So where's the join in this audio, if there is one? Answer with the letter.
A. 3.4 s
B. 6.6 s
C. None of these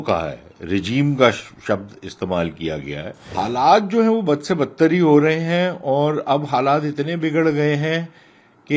A